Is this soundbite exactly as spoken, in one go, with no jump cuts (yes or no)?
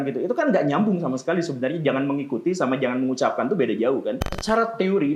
no